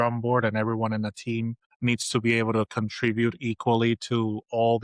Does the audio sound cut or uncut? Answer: cut